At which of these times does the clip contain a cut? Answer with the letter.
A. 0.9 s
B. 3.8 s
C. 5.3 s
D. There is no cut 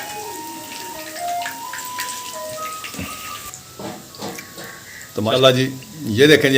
C